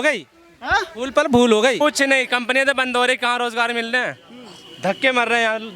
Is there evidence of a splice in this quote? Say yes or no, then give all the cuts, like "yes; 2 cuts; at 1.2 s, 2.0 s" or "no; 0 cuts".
yes; 1 cut; at 1.8 s